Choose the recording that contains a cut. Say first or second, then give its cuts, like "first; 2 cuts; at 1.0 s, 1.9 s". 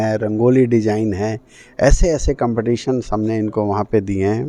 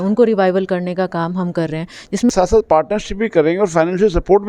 second; 1 cut; at 2.3 s